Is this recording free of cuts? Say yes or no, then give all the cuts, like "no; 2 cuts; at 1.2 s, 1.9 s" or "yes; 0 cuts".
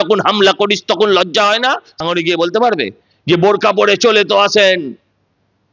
no; 1 cut; at 2.0 s